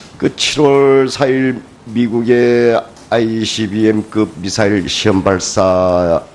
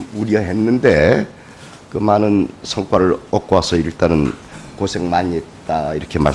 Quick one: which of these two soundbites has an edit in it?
first; 1 cut; at 5.0 s

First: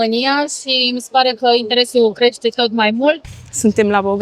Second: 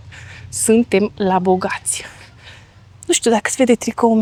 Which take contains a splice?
first; 1 cut; at 3.2 s

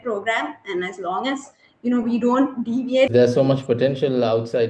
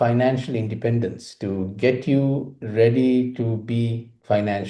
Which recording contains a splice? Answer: first; 1 cut; at 3.1 s

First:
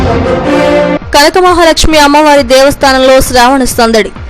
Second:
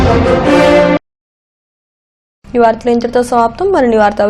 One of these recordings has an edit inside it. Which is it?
first; 1 cut; at 1.0 s

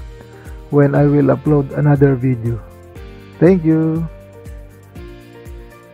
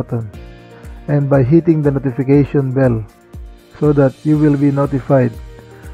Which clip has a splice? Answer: first; 1 cut; at 4.1 s

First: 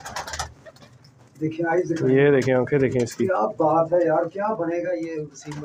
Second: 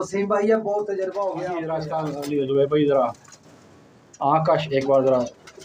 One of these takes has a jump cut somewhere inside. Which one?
second; 1 cut; at 1.7 s

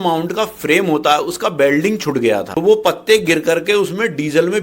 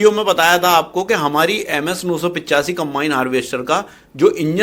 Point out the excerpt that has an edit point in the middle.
first; 1 cut; at 2.5 s

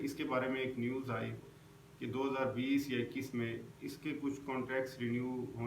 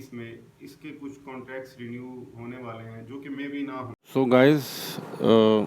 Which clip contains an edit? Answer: second; 1 cut; at 4.0 s

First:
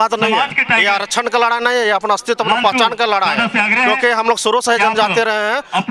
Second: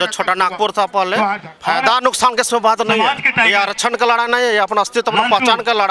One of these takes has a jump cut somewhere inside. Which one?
second; 1 cut; at 1.5 s

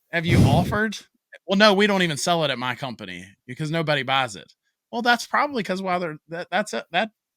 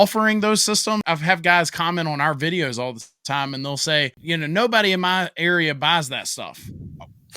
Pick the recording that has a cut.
second; 2 cuts; at 1.0 s, 4.2 s

